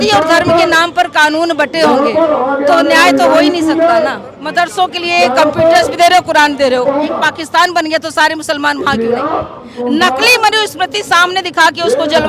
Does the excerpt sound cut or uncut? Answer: cut